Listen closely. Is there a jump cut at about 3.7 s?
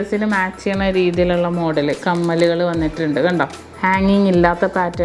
yes; 1 cut; at 3.7 s

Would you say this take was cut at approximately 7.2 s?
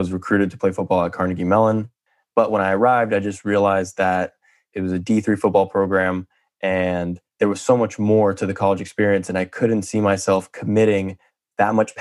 yes; 1 cut; at 7.2 s

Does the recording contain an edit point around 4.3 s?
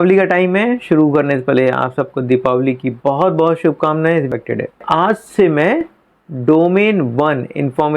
yes; 1 cut; at 4.3 s

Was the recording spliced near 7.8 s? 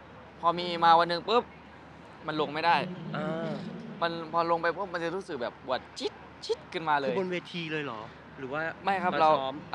no; 0 cuts

